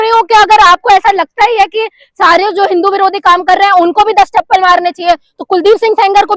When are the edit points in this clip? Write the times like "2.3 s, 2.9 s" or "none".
none